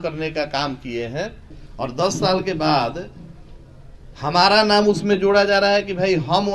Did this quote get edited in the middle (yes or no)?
yes